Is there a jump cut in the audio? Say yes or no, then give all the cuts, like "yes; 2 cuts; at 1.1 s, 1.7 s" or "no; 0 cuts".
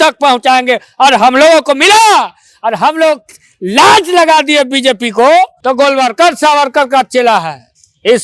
yes; 1 cut; at 5.6 s